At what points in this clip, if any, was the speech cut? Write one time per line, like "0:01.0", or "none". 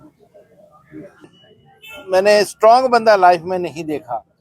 0:01.3